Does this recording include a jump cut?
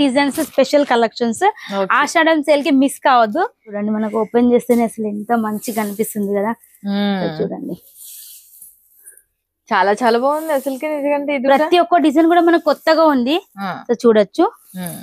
yes; 1 cut; at 3.7 s

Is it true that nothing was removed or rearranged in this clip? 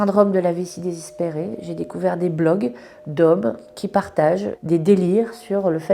yes; 0 cuts

